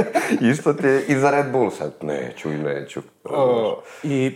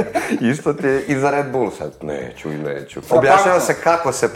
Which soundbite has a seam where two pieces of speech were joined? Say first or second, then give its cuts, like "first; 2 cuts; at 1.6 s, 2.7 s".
second; 1 cut; at 2.9 s